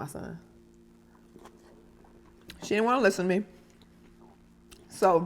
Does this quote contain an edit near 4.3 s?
no; 1 cut; at 2.5 s

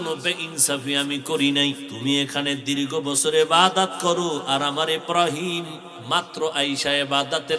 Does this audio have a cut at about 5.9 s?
no; 1 cut; at 1.9 s

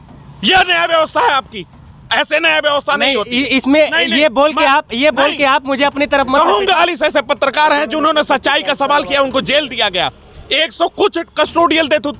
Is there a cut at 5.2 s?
no; 1 cut; at 6.8 s

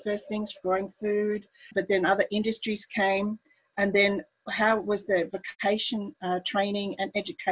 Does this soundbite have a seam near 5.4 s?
yes; 2 cuts; at 1.7 s, 5.4 s

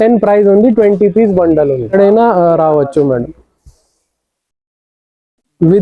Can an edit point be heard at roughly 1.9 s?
yes; 1 cut; at 1.9 s

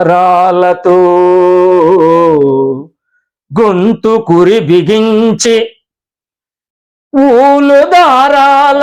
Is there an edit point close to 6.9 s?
no; 0 cuts

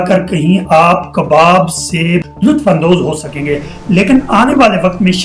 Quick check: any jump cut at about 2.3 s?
yes; 1 cut; at 2.3 s

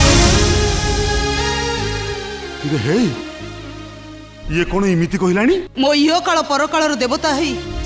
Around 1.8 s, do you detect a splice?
no; 0 cuts

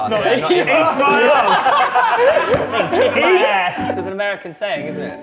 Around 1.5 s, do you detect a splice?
no; 1 cut; at 3.9 s

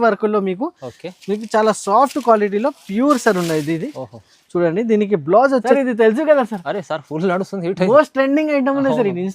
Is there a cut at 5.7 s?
yes; 1 cut; at 5.7 s

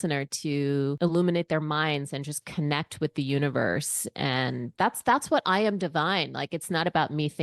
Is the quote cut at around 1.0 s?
yes; 1 cut; at 1.0 s

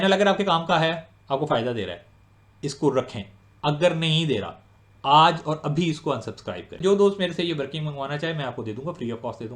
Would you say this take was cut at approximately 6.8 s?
yes; 1 cut; at 6.8 s

